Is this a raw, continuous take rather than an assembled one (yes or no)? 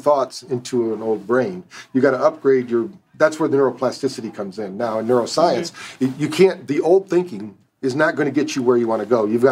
yes